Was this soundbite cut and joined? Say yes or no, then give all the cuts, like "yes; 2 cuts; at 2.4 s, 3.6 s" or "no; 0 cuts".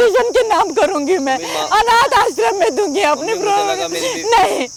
no; 0 cuts